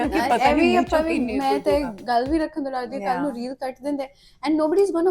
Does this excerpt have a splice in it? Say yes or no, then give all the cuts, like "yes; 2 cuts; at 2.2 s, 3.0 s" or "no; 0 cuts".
no; 0 cuts